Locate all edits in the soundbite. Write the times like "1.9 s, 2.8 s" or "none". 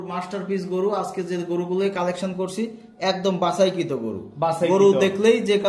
none